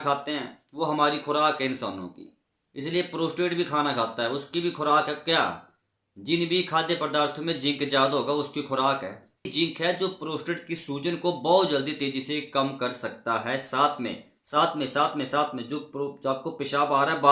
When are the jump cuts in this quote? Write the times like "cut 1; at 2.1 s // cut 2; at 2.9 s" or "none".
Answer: cut 1; at 9.5 s